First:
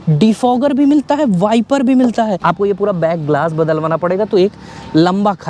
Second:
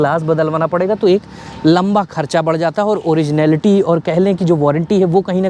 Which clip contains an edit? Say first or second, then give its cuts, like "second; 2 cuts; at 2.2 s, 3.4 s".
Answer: first; 1 cut; at 2.4 s